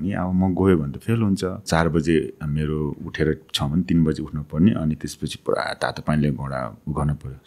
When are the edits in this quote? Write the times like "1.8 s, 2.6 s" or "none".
1.7 s

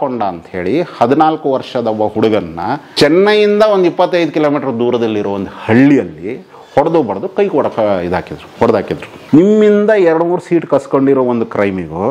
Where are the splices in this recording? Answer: 2.9 s, 9.1 s

